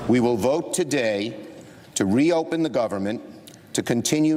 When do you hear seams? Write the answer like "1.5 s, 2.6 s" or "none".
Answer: none

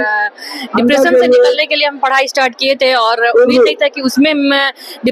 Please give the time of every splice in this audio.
none

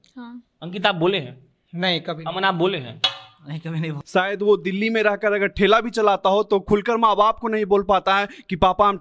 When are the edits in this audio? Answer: 4.0 s

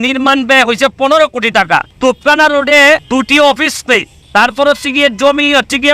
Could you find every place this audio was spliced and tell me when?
1.9 s, 3.0 s, 4.2 s

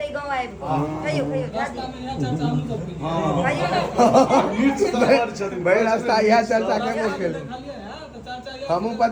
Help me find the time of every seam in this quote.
none

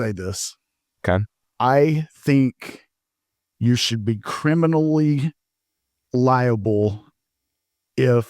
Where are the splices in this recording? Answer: 1.4 s

